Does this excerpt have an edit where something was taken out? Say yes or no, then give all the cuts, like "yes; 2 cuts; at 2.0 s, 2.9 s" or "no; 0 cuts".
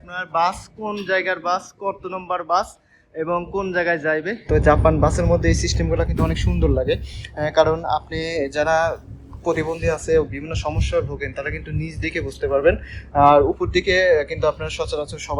yes; 1 cut; at 4.4 s